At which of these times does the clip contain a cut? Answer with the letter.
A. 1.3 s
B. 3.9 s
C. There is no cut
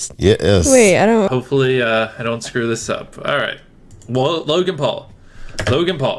A